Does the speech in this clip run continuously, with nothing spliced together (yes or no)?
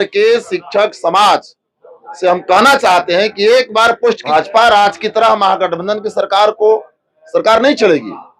no